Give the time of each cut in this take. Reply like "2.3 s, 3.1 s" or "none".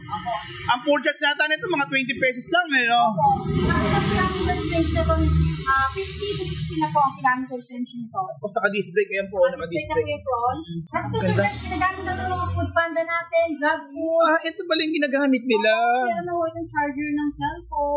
10.8 s